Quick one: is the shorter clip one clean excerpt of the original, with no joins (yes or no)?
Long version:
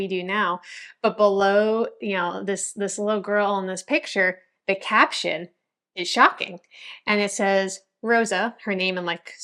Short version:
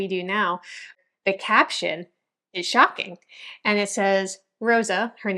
no